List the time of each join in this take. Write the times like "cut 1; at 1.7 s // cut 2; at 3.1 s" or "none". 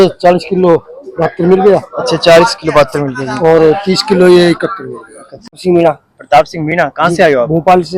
cut 1; at 5.6 s